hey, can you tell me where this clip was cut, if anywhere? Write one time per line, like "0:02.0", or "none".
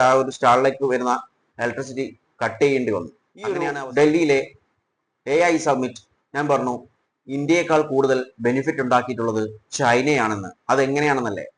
0:03.3